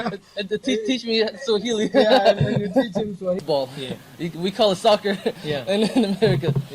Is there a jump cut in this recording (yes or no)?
yes